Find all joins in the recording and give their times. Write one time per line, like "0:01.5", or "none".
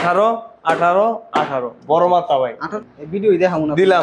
0:02.7